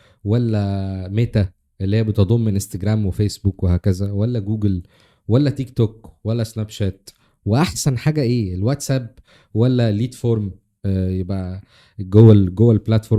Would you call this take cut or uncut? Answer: uncut